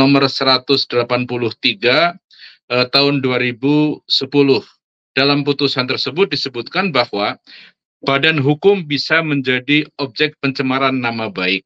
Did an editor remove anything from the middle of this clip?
no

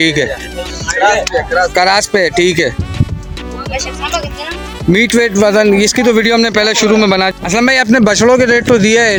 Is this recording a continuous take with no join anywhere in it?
yes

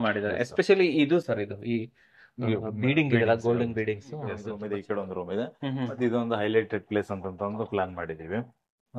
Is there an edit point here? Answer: yes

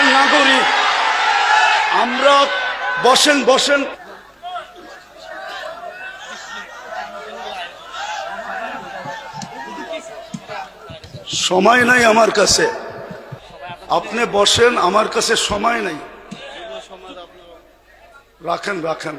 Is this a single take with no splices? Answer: no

